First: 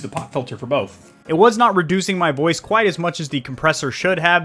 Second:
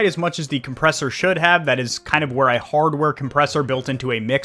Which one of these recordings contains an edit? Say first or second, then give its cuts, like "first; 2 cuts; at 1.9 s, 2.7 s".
first; 1 cut; at 1.1 s